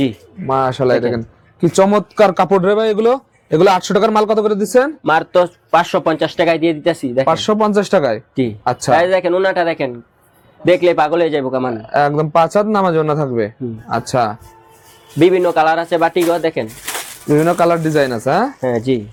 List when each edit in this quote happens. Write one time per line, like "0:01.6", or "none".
none